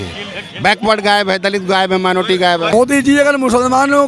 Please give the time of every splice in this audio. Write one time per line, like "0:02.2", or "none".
0:02.9